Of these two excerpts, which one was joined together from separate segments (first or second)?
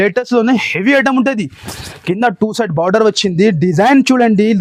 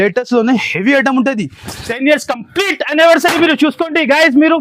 second